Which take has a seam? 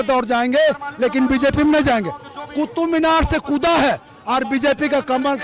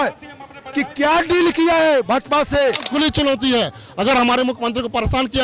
second; 1 cut; at 2.9 s

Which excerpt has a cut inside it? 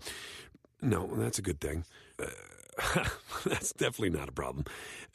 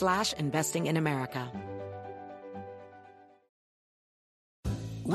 second; 1 cut; at 1.5 s

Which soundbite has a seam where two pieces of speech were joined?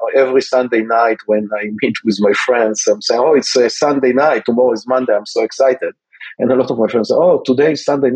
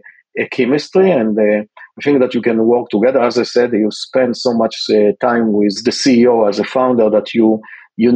second; 1 cut; at 5.8 s

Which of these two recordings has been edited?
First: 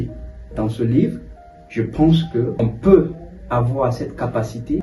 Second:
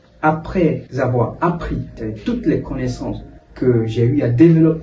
second; 1 cut; at 2.0 s

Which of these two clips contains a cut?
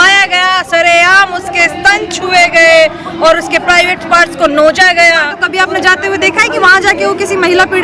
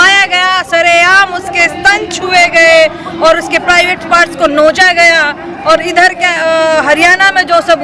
first; 1 cut; at 5.4 s

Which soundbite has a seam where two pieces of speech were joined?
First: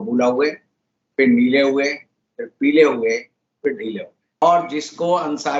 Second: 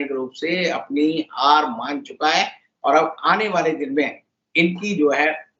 first; 1 cut; at 4.4 s

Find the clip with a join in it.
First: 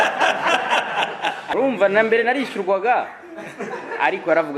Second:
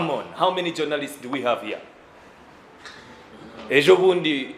first; 1 cut; at 1.4 s

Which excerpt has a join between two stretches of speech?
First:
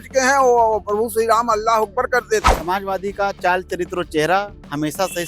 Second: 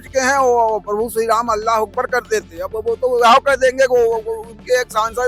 first; 1 cut; at 2.5 s

